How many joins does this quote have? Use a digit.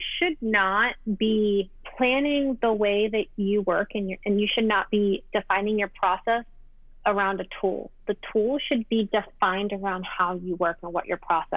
2